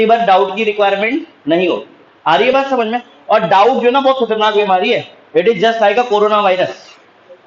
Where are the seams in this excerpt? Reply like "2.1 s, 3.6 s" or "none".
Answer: none